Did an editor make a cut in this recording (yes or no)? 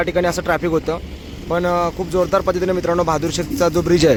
no